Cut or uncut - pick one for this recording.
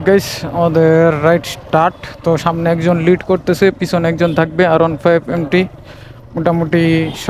uncut